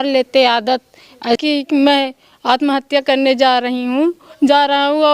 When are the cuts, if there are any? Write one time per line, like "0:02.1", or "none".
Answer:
0:01.4